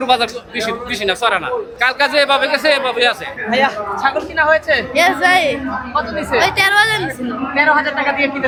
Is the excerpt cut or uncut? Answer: uncut